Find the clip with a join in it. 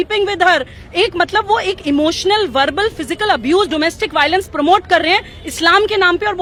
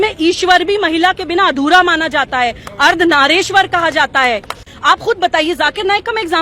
second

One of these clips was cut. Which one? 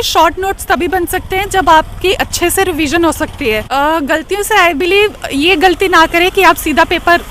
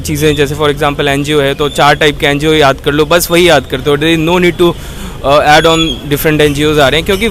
first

